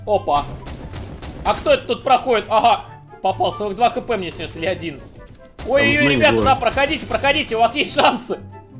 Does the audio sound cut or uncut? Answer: uncut